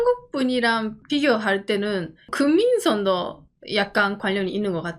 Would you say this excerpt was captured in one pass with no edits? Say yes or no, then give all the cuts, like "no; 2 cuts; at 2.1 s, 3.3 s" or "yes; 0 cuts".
no; 2 cuts; at 1.0 s, 2.3 s